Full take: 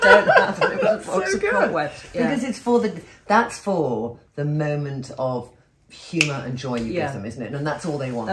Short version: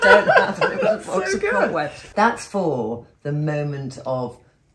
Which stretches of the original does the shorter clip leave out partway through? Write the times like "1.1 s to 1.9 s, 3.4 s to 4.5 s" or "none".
2.0 s to 3.1 s